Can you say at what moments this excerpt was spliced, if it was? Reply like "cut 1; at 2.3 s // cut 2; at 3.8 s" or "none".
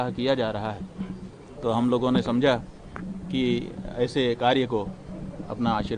none